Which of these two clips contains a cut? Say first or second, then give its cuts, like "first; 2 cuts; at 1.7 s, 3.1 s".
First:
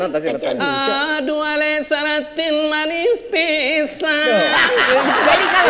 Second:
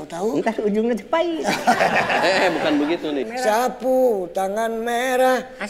second; 1 cut; at 3.2 s